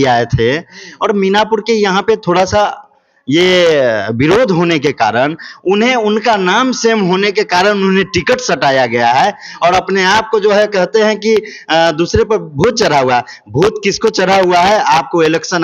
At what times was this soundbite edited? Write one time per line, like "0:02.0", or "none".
none